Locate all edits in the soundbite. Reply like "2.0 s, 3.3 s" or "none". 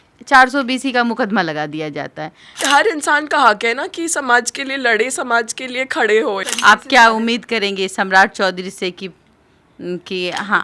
2.5 s, 6.5 s